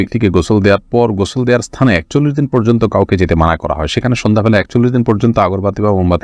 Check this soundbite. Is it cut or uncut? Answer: uncut